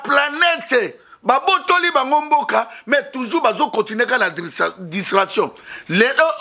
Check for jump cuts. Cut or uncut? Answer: uncut